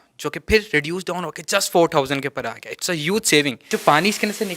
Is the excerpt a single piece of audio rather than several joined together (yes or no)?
no